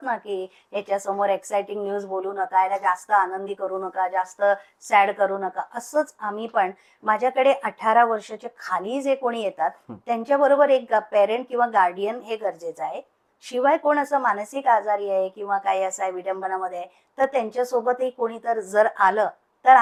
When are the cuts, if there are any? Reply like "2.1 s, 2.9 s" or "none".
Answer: none